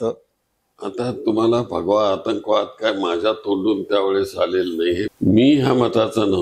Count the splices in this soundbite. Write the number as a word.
one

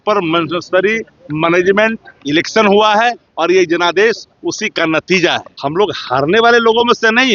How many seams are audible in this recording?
one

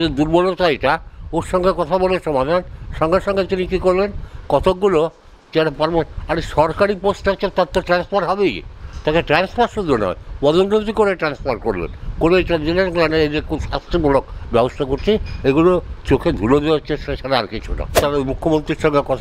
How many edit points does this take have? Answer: one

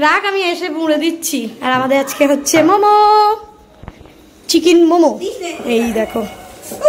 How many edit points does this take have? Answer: zero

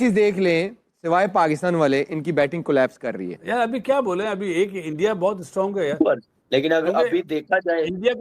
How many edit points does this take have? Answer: two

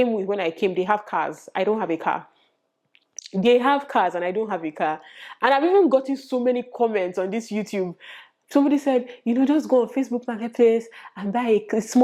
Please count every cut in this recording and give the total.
zero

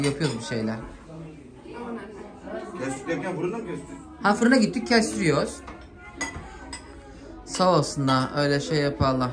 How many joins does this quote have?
zero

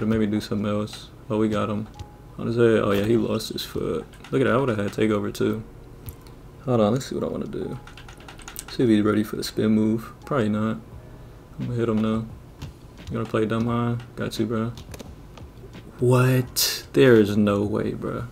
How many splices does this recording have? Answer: zero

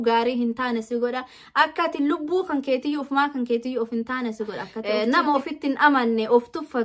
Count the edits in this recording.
one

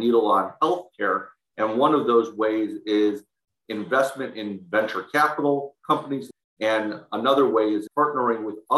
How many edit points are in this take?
two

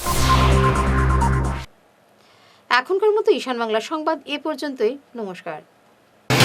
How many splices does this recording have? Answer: zero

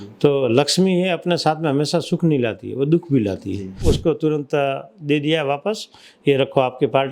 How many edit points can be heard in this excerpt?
one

